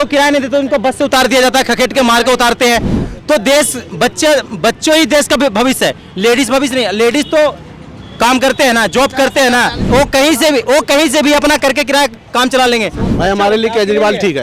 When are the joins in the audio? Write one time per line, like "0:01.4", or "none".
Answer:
0:09.8
0:13.0